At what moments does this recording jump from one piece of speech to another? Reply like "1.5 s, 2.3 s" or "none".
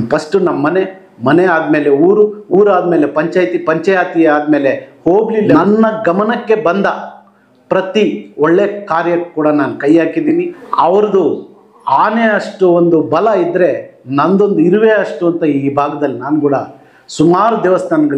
5.5 s, 10.6 s